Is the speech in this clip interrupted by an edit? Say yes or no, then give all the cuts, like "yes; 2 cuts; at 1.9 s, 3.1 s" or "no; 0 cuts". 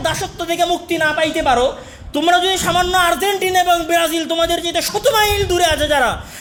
no; 0 cuts